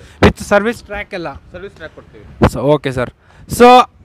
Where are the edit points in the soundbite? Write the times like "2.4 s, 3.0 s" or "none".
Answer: none

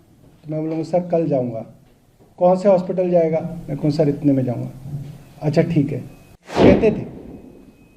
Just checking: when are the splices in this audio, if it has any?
6.5 s

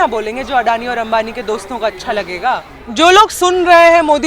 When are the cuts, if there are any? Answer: 2.8 s

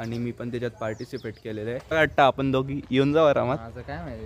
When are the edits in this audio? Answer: 1.9 s

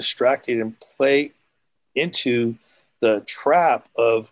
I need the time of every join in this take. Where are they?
none

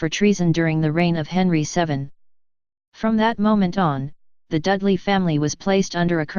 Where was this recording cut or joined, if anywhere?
5.0 s

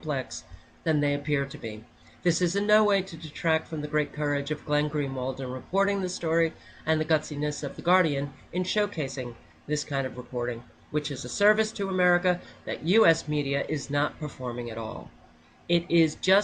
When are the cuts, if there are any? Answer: 6.8 s

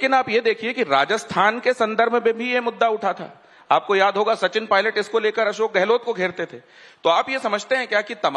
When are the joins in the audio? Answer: none

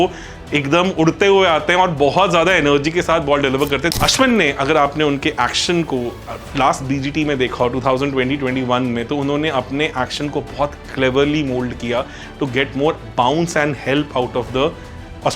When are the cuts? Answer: 4.0 s

